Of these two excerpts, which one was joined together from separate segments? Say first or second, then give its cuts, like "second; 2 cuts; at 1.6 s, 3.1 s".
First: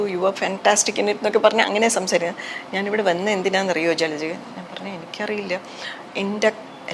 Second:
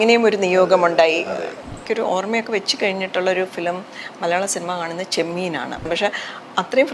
second; 2 cuts; at 1.8 s, 5.9 s